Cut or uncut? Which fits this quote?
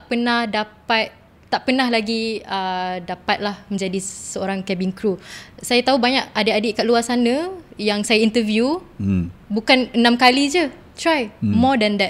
uncut